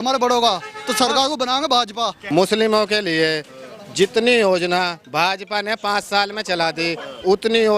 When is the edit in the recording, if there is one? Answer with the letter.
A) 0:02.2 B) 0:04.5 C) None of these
A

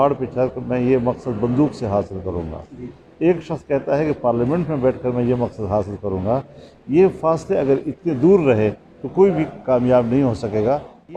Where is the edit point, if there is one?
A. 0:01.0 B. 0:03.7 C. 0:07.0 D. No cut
D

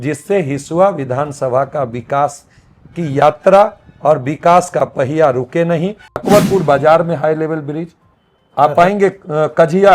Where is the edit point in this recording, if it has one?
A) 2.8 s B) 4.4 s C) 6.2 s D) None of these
C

